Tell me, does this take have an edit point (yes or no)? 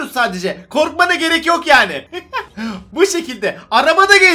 no